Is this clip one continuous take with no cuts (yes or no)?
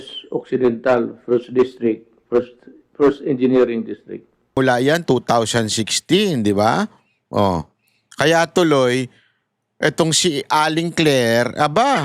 no